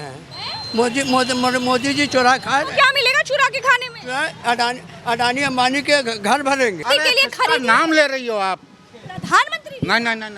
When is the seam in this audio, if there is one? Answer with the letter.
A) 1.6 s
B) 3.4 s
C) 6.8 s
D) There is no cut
C